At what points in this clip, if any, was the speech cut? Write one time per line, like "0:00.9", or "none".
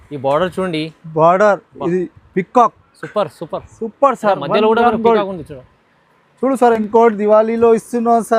0:06.8